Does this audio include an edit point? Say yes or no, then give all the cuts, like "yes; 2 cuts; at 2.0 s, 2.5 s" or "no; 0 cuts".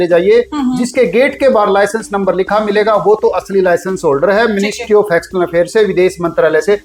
no; 0 cuts